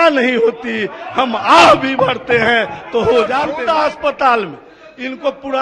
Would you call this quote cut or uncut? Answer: cut